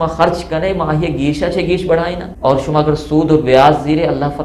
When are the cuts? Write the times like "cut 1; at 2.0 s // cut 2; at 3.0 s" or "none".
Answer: cut 1; at 2.2 s